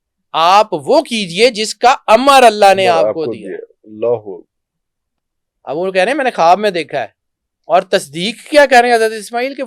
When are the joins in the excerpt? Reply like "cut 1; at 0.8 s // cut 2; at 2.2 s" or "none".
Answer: none